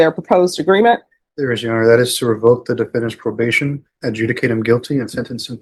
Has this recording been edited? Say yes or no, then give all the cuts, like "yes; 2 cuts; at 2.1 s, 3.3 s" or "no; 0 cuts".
no; 0 cuts